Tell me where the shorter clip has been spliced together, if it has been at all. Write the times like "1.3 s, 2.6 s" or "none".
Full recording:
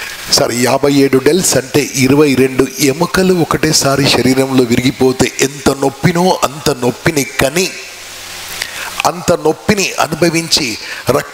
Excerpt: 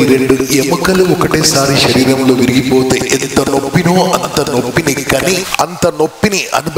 5.5 s